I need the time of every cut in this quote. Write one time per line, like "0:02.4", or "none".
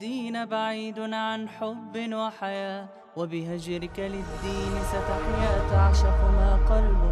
none